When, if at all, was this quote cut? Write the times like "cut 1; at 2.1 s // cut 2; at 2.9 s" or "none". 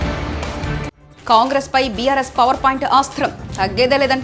cut 1; at 0.9 s